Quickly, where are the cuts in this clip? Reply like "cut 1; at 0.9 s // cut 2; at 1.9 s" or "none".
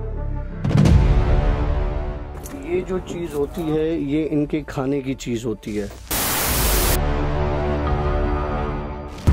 none

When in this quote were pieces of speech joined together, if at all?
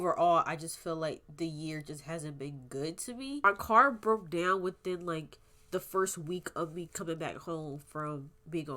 cut 1; at 3.4 s

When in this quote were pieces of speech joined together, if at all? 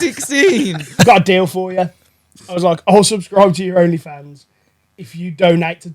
cut 1; at 1.0 s

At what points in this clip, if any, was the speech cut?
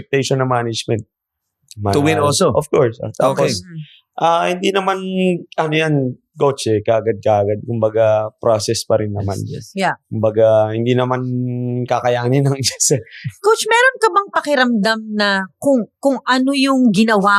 none

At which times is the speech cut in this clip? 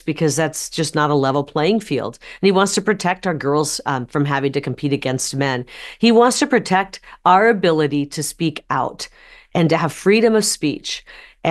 none

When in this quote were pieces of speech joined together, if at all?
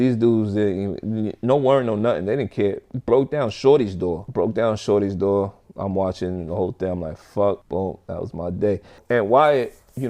cut 1; at 9.0 s

